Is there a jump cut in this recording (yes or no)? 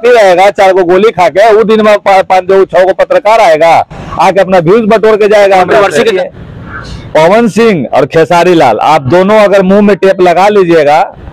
yes